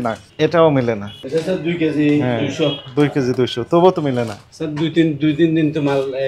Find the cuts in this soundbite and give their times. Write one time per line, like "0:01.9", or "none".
0:01.2